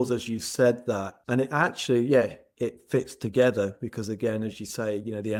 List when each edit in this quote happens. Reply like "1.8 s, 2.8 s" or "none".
none